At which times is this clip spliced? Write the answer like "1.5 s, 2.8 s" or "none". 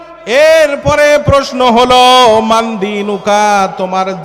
none

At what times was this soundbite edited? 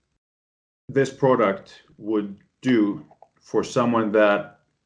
none

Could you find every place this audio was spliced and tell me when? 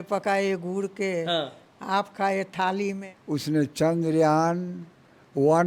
3.1 s

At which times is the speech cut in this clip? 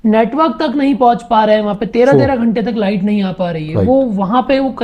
none

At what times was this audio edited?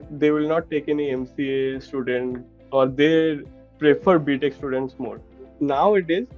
5.5 s

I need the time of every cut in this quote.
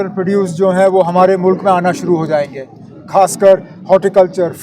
none

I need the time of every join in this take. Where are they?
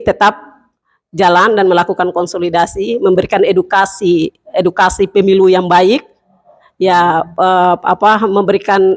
none

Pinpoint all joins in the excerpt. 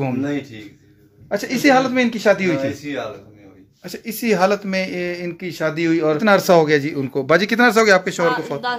6.2 s

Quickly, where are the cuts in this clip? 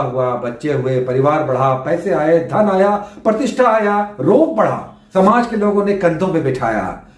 none

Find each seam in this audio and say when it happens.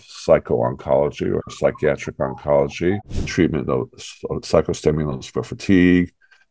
3.3 s

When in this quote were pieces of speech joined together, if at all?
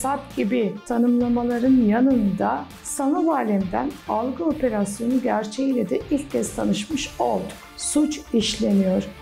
7.6 s

